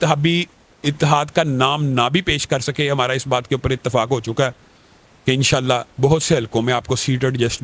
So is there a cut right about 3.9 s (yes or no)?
no